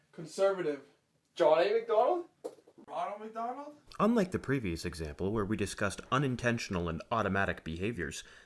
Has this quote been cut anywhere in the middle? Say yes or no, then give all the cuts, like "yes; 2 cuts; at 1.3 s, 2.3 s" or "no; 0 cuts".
no; 0 cuts